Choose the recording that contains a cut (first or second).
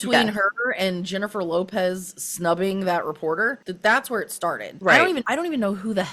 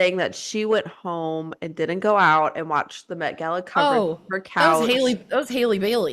first